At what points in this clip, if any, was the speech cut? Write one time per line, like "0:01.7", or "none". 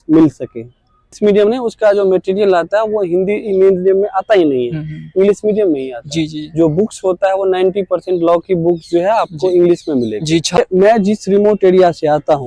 0:01.2
0:10.6